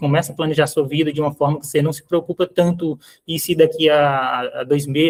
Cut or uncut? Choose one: uncut